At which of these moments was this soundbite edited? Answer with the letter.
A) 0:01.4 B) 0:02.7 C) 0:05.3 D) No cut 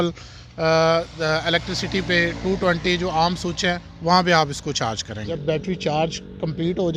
C